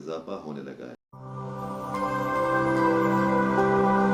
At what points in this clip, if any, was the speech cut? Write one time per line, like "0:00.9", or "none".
0:01.0